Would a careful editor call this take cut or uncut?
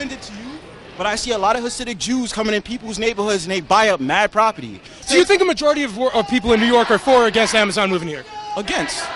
cut